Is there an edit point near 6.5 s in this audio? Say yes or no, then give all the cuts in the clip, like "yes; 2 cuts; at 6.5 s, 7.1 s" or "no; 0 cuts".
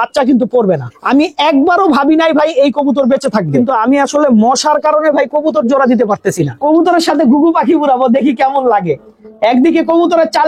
yes; 3 cuts; at 0.9 s, 3.6 s, 6.5 s